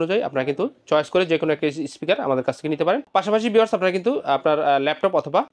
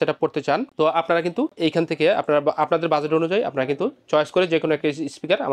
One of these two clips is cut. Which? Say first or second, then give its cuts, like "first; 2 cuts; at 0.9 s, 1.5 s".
second; 1 cut; at 1.5 s